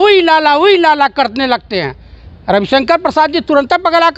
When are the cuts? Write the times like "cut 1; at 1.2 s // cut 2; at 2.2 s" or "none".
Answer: none